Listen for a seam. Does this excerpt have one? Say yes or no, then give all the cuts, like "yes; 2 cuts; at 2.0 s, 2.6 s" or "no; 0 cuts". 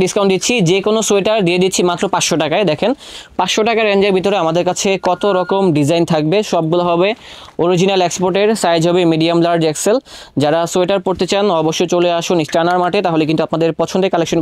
no; 0 cuts